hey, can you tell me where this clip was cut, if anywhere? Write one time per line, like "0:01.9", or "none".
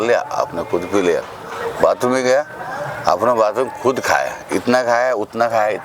none